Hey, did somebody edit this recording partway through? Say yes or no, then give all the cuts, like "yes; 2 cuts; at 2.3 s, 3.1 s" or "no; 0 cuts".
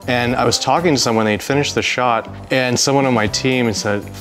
yes; 1 cut; at 2.3 s